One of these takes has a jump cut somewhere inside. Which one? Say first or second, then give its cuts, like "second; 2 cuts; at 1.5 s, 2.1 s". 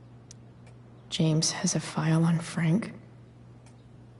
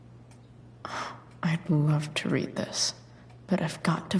first; 1 cut; at 1.1 s